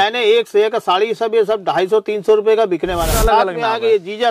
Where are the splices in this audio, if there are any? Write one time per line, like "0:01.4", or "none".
0:03.1